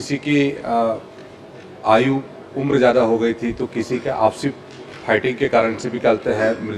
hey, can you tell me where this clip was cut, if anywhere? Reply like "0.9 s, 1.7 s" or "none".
none